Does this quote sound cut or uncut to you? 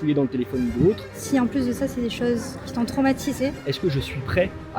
cut